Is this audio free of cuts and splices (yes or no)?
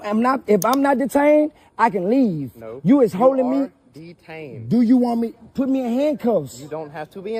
yes